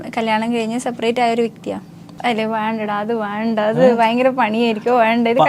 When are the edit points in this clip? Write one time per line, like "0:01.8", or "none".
0:02.1

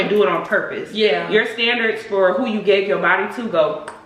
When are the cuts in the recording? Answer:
none

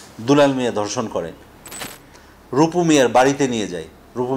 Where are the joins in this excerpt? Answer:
0:01.8

